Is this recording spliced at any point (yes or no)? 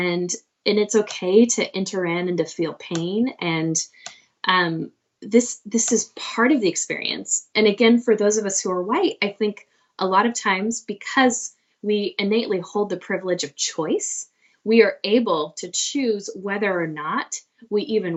no